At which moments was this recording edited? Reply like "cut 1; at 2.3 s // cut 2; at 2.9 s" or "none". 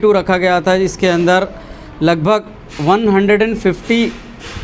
none